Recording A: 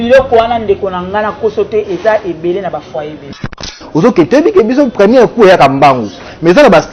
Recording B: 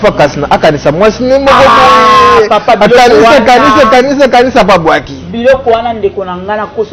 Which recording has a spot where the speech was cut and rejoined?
A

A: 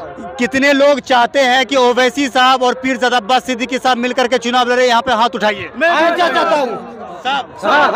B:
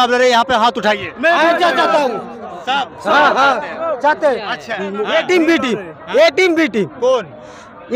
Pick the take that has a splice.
B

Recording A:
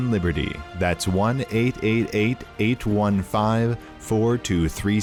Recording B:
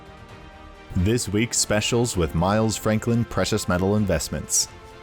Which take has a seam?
B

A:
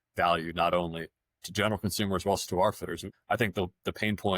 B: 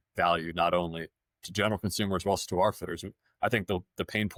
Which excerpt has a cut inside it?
A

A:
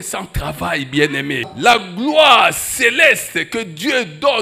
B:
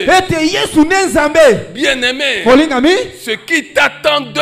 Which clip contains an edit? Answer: A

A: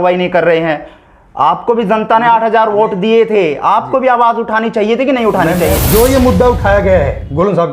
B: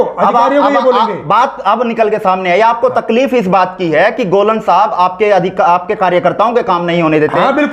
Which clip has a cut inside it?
A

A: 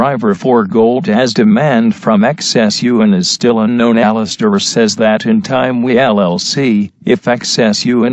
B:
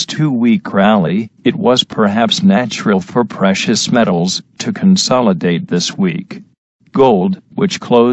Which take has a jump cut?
B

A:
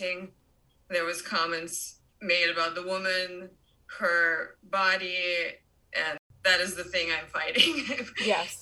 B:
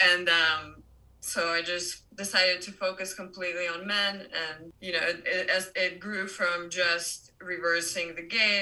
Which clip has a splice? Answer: B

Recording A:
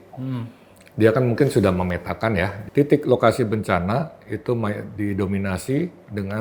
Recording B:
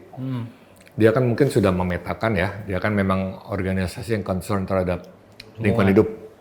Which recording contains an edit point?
A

